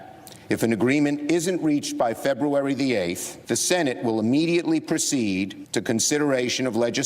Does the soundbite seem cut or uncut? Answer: cut